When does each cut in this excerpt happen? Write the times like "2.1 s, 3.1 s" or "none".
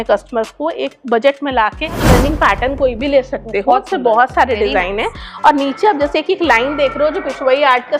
2.0 s

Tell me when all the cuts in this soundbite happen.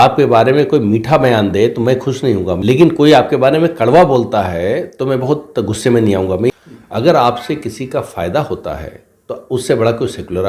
2.6 s, 6.5 s

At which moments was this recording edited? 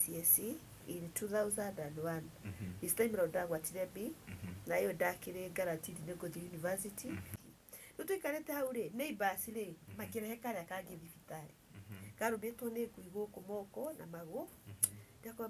7.3 s

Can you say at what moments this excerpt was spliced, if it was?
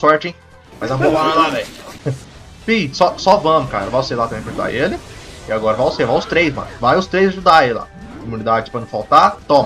none

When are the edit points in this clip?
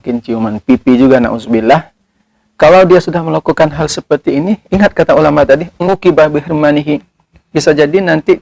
5.8 s

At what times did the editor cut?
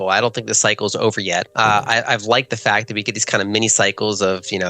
1.5 s

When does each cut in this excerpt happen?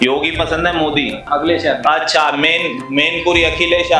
1.2 s

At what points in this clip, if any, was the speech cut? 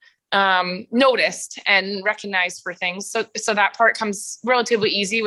none

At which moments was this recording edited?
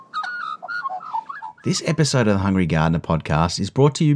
1.4 s

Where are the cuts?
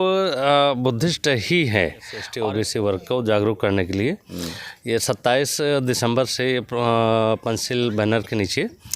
2.2 s

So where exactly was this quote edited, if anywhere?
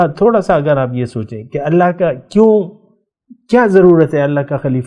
none

